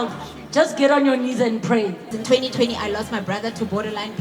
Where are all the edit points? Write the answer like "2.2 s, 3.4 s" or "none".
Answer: 2.2 s